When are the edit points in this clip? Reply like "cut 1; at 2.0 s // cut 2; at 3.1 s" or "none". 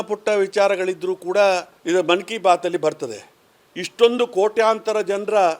cut 1; at 1.7 s